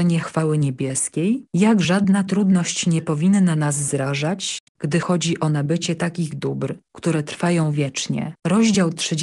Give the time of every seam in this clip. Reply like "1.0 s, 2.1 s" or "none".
8.3 s